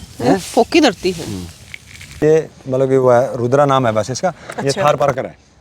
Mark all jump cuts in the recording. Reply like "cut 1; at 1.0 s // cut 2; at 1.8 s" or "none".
cut 1; at 2.2 s